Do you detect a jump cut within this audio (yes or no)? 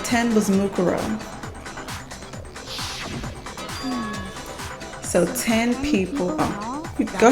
no